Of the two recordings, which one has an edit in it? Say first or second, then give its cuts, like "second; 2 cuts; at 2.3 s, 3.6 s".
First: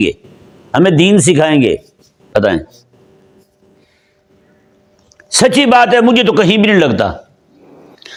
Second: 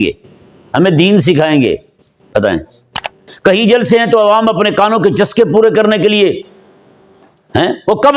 second; 1 cut; at 3.2 s